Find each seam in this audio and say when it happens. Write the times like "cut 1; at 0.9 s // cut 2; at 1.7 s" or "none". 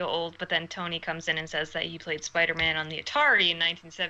none